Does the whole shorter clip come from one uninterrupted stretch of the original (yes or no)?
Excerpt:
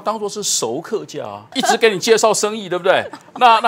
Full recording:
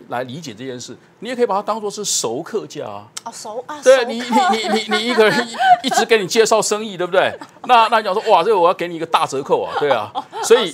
no